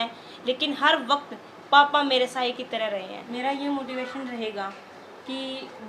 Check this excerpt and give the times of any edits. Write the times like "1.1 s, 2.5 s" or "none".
3.2 s